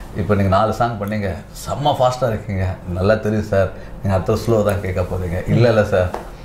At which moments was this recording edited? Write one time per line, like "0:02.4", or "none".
none